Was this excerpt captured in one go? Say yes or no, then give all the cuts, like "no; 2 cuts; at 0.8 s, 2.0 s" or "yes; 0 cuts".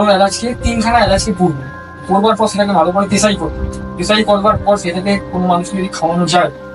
yes; 0 cuts